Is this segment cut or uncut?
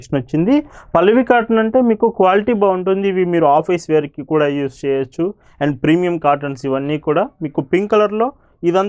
uncut